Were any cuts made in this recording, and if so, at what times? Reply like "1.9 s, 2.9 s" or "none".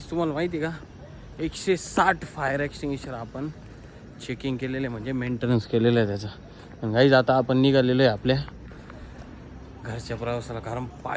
none